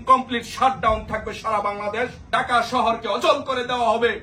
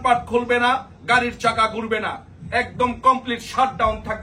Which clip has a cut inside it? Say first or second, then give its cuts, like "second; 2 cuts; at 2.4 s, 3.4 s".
first; 1 cut; at 2.2 s